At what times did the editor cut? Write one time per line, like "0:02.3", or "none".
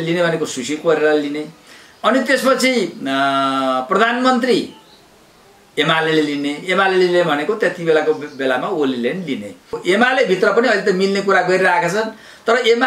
0:09.7